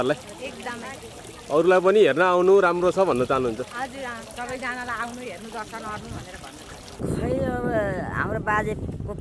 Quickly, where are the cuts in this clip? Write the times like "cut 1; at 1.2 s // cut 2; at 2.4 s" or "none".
cut 1; at 6.9 s